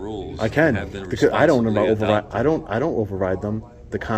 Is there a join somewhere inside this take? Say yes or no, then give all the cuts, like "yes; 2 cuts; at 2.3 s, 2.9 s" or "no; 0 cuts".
no; 0 cuts